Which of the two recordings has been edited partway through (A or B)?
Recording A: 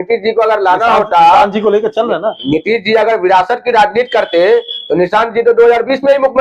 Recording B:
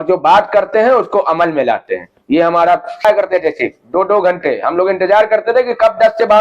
B